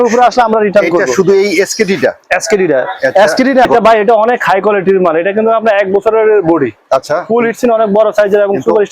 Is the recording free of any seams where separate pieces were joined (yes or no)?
no